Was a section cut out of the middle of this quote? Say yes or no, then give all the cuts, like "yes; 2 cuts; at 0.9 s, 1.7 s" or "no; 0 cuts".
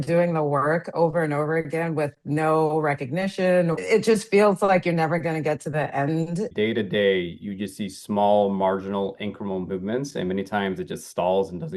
yes; 2 cuts; at 3.8 s, 6.5 s